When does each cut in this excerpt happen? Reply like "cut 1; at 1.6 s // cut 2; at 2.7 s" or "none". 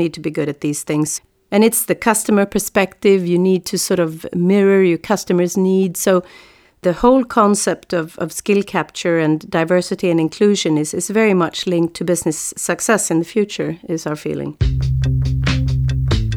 cut 1; at 14.6 s